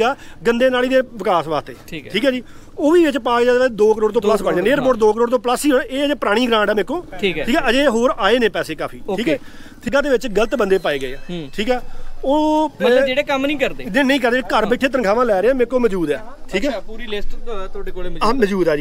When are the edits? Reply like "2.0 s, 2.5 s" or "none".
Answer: 9.9 s